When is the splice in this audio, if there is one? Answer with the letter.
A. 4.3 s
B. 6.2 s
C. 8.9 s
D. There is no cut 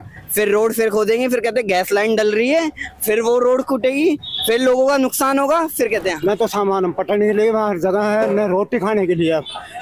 B